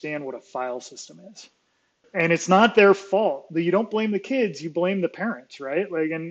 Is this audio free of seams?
no; 1 cut; at 2.0 s

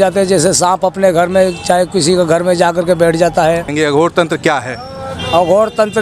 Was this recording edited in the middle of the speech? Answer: yes; 1 cut; at 3.7 s

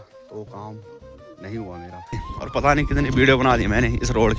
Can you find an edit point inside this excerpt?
yes; 1 cut; at 2.3 s

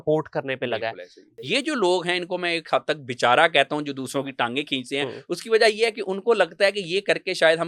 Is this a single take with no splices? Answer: no; 1 cut; at 1.3 s

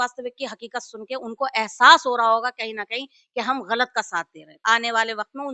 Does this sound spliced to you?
yes; 1 cut; at 4.5 s

